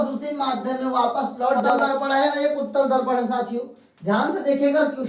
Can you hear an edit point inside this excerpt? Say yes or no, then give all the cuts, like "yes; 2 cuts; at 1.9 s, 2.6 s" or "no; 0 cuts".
yes; 1 cut; at 1.7 s